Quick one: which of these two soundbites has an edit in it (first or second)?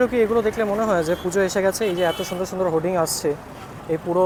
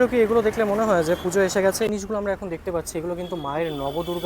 second